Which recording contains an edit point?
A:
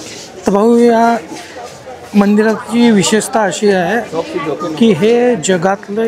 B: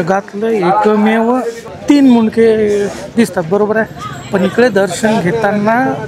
B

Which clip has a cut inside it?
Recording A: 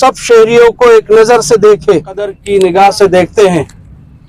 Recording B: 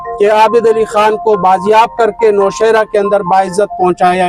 A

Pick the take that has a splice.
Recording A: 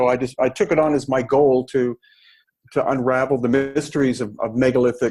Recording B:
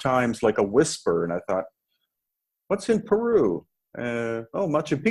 A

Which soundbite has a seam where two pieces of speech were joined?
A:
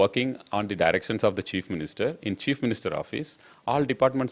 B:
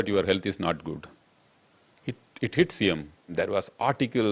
B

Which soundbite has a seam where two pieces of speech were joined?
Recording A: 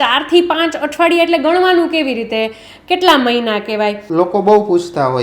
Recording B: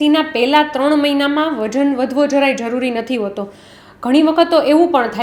A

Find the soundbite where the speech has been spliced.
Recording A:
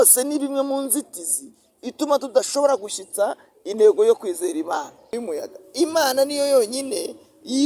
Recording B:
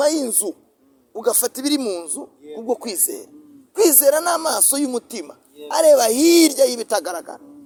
A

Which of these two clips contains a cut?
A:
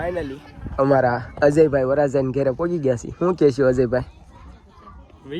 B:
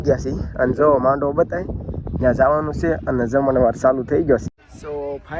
B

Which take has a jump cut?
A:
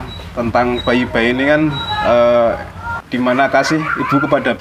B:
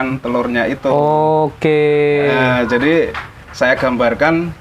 A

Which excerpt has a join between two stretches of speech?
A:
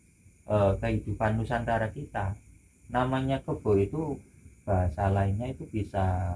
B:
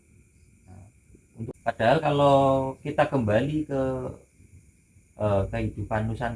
B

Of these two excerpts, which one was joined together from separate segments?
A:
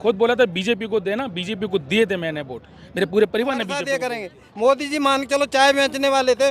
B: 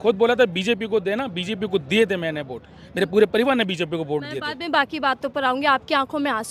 A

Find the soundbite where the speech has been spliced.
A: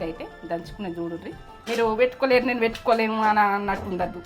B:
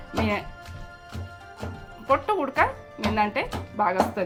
A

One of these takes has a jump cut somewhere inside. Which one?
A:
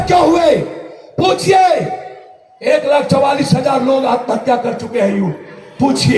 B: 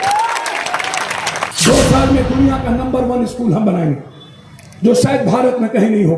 B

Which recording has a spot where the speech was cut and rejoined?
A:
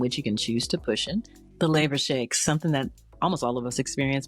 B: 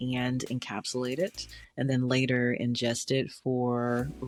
A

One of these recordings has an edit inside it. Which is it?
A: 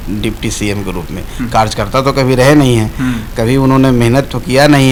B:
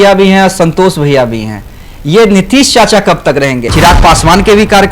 B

